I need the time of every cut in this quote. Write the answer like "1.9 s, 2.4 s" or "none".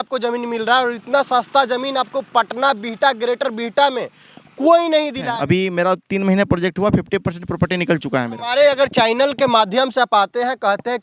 5.3 s, 8.5 s